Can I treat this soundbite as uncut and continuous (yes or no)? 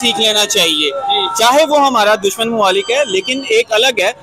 yes